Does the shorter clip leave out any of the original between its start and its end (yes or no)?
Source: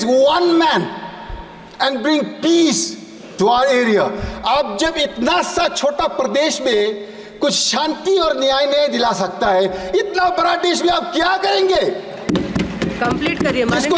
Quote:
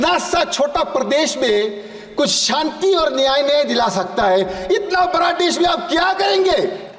no